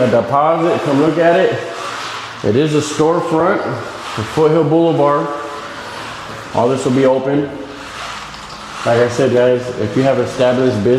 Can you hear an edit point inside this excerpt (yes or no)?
no